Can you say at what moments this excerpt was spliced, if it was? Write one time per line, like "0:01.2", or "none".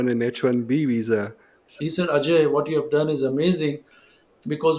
0:01.6